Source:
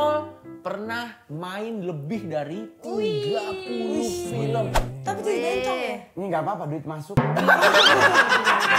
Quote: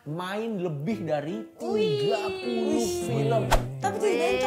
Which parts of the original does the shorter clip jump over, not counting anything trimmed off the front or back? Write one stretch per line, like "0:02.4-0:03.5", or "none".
none

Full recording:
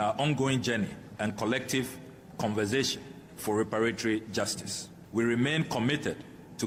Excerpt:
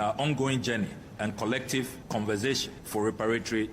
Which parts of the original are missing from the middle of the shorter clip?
0:02.0-0:02.3
0:03.0-0:03.3

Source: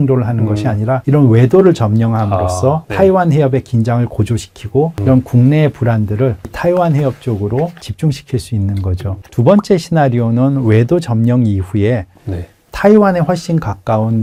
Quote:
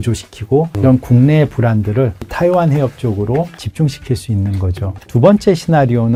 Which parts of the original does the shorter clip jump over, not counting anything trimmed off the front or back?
none

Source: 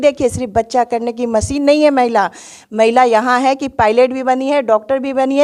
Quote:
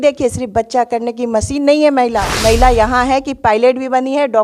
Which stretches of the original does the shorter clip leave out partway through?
0:02.3-0:02.6

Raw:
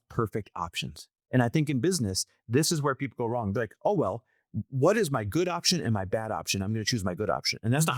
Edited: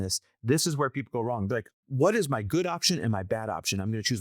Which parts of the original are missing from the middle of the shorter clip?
0:03.7-0:04.5

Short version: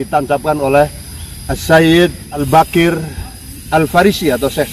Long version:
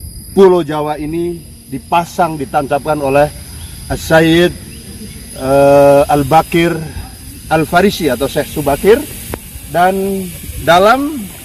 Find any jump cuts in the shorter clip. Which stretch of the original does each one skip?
0:04.8-0:06.2

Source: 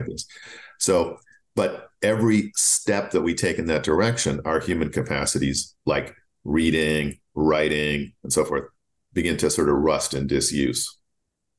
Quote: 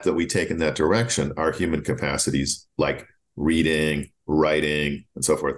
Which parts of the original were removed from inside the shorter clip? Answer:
none

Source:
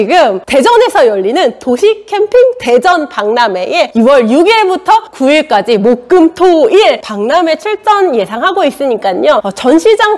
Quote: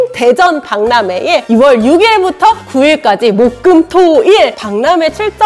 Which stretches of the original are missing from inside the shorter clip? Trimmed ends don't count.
none

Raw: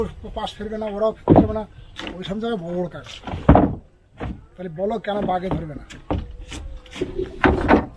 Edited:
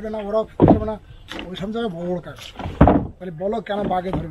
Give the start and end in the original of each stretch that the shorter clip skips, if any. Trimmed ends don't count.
0:03.9-0:04.6

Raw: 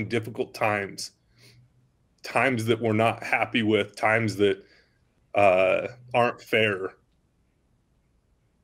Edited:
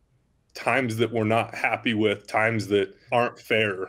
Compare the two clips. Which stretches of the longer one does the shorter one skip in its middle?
0:04.7-0:06.0

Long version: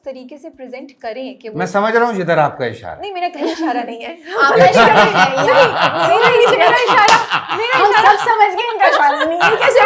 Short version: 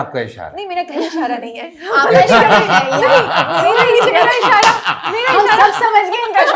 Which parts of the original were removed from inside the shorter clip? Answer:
none

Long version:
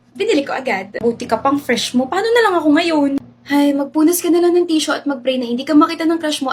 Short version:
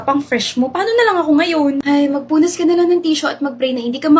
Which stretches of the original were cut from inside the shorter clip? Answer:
0:03.2-0:03.4

